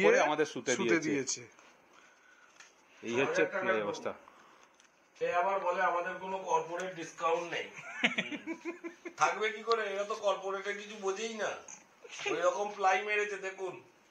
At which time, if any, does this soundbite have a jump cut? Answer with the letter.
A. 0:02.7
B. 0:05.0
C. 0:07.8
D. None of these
B